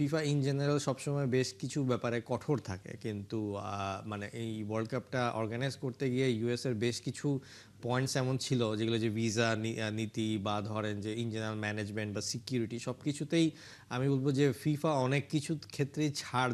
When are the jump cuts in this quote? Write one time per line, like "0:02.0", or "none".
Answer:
none